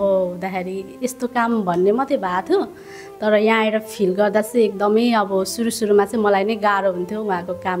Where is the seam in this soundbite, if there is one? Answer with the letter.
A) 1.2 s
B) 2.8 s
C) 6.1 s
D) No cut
D